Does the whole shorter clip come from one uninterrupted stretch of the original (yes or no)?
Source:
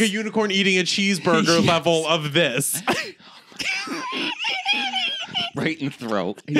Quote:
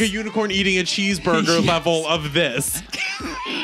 no